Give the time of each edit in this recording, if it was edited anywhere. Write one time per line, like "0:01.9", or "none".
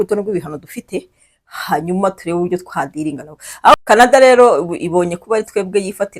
0:03.7